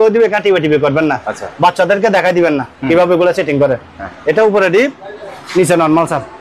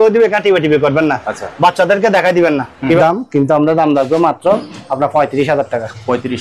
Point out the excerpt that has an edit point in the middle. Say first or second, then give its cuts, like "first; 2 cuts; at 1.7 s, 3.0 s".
second; 1 cut; at 3.0 s